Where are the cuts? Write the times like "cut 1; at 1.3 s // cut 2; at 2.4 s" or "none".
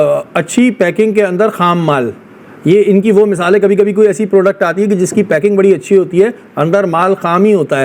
none